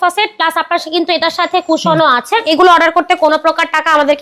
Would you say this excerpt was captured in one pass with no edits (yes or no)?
no